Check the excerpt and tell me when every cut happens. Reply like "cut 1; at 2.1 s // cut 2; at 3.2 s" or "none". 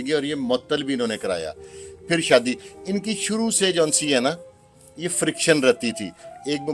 none